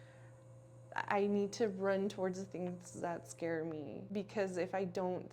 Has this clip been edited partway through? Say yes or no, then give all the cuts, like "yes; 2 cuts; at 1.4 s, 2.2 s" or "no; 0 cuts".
yes; 1 cut; at 4.1 s